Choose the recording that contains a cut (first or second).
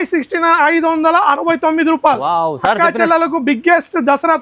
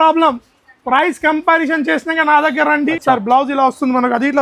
second